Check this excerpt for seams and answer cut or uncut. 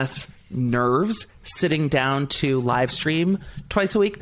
uncut